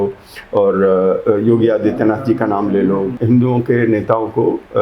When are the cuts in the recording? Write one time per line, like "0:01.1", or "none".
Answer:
0:03.2